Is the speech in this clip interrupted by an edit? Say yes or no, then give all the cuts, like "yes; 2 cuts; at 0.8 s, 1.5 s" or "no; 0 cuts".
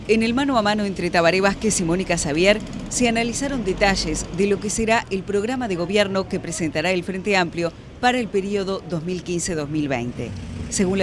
yes; 1 cut; at 8.0 s